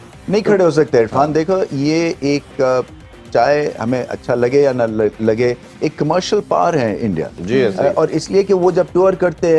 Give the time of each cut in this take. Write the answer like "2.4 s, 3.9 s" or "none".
none